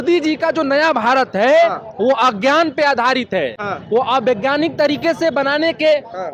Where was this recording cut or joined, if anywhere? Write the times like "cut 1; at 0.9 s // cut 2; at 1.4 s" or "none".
none